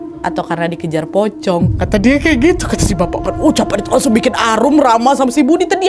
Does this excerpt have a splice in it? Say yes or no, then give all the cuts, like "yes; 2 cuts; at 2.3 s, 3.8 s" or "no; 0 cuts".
no; 0 cuts